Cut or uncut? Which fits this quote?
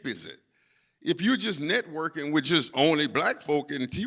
uncut